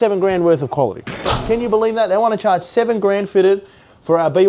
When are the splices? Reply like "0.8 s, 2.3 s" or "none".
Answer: 1.2 s